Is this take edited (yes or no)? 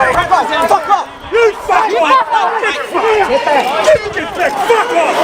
no